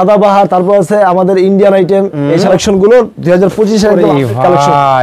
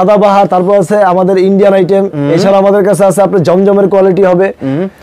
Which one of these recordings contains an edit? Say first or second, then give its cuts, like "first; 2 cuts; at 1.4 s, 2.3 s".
first; 1 cut; at 2.5 s